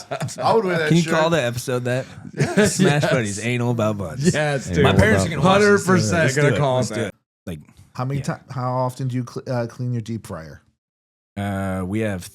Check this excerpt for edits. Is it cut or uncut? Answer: cut